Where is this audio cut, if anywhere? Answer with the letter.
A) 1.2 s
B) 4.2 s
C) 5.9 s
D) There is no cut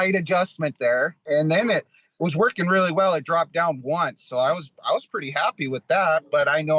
A